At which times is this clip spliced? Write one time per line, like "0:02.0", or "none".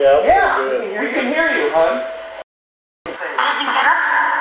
0:03.1